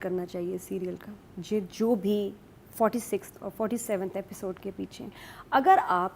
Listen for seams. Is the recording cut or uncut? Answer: uncut